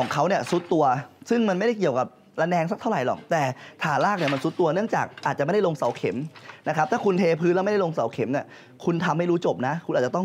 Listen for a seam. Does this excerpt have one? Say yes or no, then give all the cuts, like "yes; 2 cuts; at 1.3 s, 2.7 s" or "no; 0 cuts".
no; 0 cuts